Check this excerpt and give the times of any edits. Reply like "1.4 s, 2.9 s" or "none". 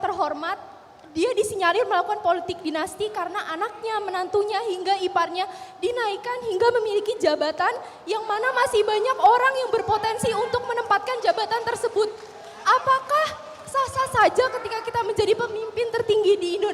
none